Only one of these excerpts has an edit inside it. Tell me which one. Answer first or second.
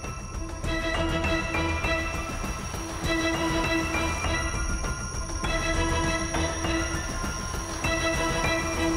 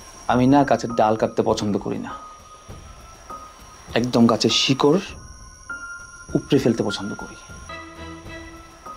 second